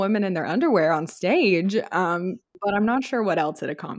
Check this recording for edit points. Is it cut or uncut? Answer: cut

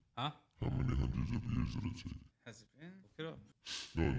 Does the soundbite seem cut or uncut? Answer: uncut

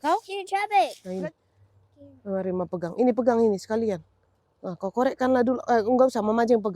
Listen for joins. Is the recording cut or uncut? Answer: cut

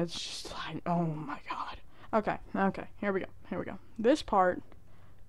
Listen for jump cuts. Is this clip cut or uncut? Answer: uncut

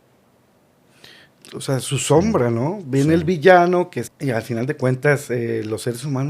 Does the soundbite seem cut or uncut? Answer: cut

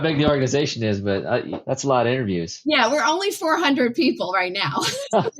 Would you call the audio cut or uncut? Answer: cut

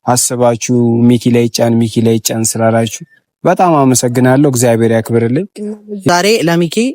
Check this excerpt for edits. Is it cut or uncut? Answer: cut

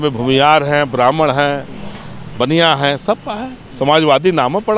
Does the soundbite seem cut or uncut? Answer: uncut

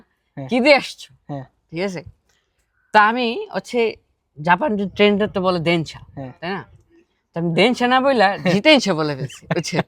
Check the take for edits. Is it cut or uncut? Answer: uncut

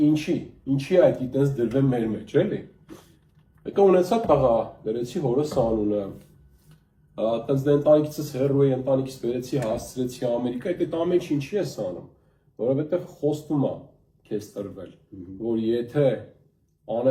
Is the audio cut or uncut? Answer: uncut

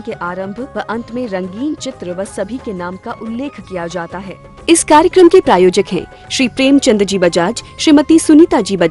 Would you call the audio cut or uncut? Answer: cut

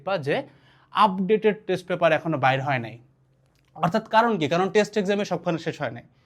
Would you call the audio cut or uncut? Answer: uncut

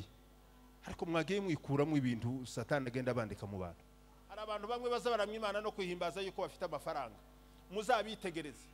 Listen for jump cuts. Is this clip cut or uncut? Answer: cut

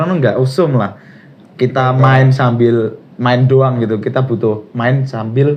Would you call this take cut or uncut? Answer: uncut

